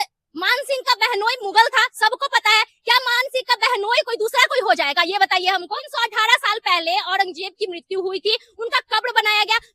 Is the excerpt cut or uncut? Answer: cut